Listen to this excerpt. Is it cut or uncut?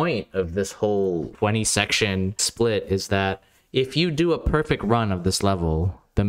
cut